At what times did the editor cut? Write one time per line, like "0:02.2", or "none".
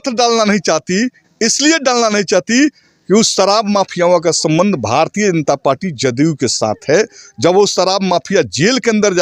none

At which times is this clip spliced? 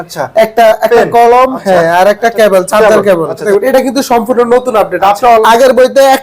0:03.4
0:05.4

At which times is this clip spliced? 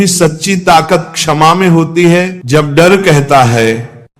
0:02.4

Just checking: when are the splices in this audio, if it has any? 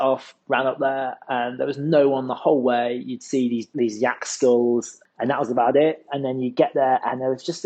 none

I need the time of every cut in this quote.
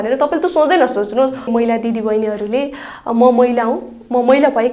0:01.5

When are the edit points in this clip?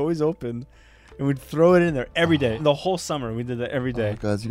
0:02.6

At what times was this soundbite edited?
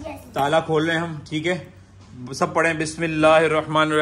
none

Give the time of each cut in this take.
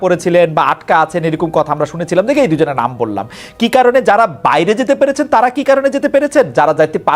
none

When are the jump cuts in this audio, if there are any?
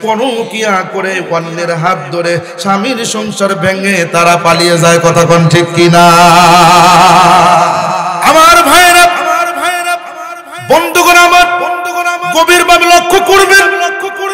0:08.1

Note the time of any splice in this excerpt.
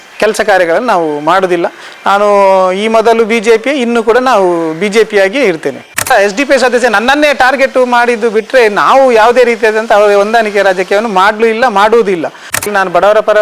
0:06.1
0:12.7

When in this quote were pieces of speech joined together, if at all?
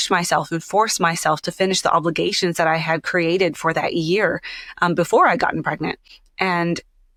none

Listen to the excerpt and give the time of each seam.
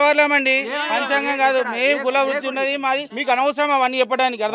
0:03.1

